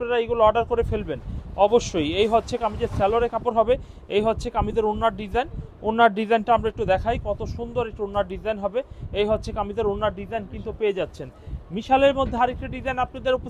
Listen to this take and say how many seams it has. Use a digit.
0